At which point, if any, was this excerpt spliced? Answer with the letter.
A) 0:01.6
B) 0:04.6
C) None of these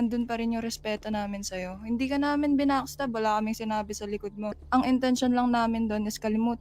B